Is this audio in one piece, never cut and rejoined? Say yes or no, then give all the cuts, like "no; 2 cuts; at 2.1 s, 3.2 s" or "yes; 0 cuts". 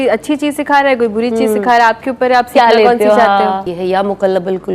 no; 1 cut; at 3.7 s